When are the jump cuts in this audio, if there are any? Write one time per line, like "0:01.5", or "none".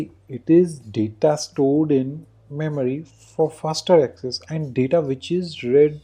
none